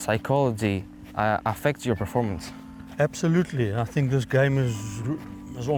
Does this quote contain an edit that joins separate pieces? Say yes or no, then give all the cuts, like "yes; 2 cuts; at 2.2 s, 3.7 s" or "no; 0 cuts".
no; 0 cuts